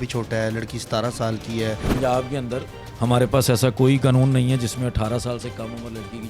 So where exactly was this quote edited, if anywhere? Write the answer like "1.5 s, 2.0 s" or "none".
1.8 s